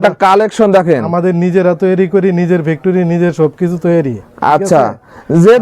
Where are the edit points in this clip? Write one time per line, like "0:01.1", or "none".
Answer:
none